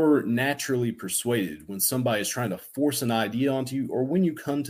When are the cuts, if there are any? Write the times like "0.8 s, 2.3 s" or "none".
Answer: none